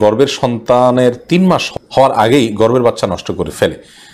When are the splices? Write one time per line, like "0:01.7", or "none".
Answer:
0:01.7